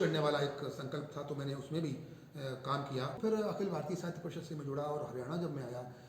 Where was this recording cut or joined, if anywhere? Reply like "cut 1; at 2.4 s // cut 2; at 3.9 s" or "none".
cut 1; at 3.2 s

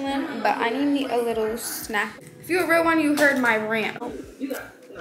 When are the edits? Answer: cut 1; at 2.1 s // cut 2; at 4.0 s

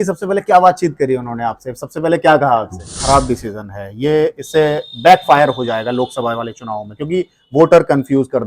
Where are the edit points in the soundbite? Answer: cut 1; at 3.0 s

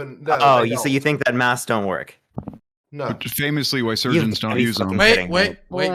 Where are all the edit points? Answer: none

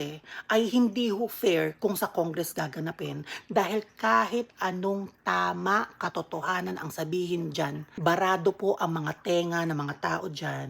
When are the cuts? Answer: cut 1; at 7.9 s

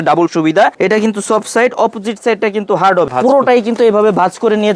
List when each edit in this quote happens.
cut 1; at 0.7 s // cut 2; at 3.1 s

